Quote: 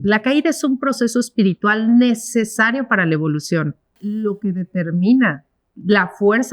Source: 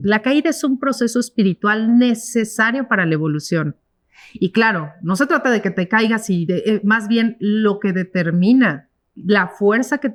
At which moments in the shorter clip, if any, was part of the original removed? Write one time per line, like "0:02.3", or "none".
0:04.0